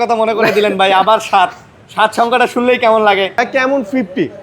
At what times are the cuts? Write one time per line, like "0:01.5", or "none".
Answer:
0:03.4